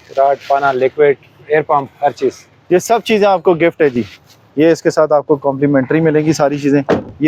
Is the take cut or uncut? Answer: uncut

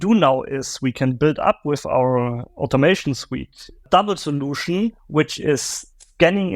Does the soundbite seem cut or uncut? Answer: cut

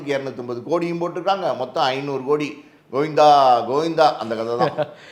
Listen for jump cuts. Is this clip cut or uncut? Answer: uncut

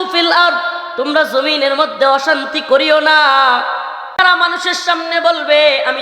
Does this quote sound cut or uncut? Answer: cut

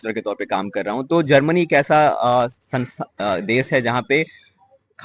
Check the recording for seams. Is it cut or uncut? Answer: uncut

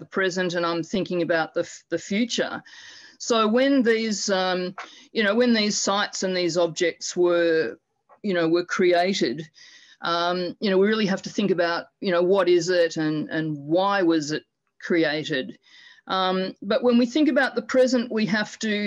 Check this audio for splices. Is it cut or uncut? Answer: uncut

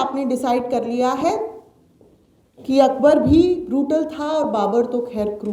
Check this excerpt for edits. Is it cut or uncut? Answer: uncut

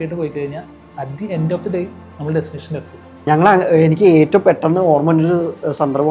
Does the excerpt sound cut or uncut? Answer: cut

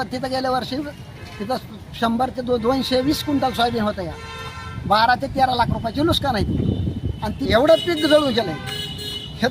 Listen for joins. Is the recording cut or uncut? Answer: cut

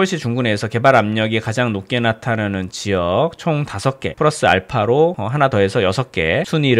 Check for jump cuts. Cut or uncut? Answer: uncut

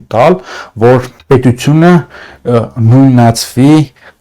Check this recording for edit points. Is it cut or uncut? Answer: cut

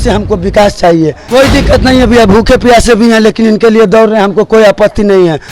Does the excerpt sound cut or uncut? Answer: cut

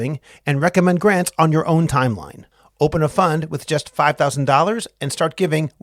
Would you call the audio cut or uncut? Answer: uncut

